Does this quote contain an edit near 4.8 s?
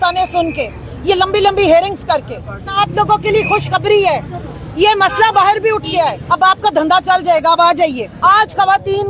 no; 3 cuts; at 2.8 s, 6.2 s, 8.1 s

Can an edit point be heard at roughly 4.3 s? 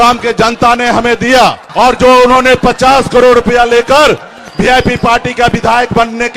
no; 1 cut; at 1.6 s

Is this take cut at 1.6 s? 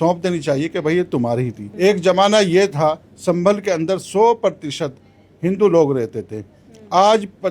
yes; 1 cut; at 1.6 s

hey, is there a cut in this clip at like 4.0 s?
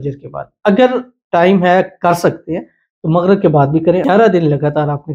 yes; 1 cut; at 4.0 s

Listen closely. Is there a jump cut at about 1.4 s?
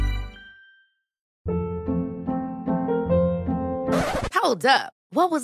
yes; 1 cut; at 1.4 s

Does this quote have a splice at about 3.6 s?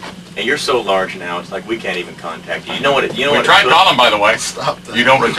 no; 1 cut; at 1.6 s

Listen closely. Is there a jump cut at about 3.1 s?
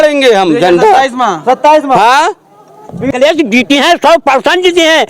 yes; 1 cut; at 3.1 s

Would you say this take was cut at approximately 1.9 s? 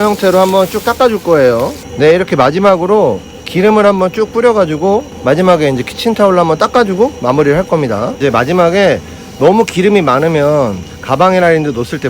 yes; 3 cuts; at 1.9 s, 5.1 s, 8.2 s

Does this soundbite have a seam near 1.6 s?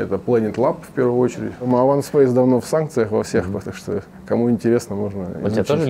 yes; 1 cut; at 1.6 s

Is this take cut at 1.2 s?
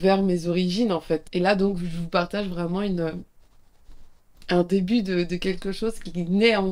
yes; 1 cut; at 1.2 s

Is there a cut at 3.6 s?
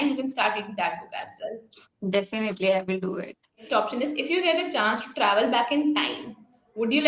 yes; 1 cut; at 3.6 s

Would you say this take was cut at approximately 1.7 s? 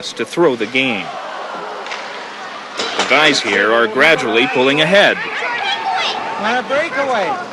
no; 0 cuts

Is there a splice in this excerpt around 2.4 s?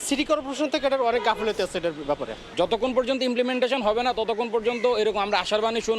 yes; 1 cut; at 2.4 s

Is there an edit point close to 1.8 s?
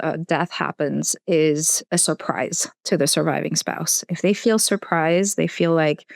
yes; 1 cut; at 1.8 s

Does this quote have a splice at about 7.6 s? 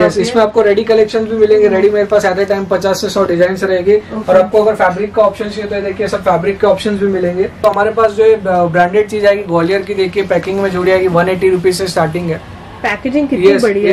yes; 1 cut; at 7.6 s

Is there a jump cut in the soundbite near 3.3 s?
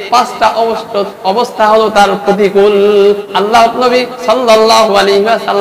yes; 1 cut; at 3.3 s

